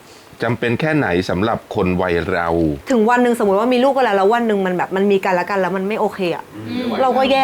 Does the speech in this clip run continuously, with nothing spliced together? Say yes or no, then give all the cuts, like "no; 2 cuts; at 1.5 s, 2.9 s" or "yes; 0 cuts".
no; 1 cut; at 2.8 s